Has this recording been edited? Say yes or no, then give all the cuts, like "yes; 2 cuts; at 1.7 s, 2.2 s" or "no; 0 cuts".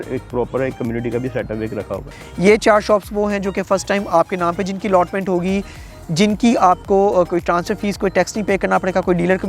yes; 1 cut; at 2.0 s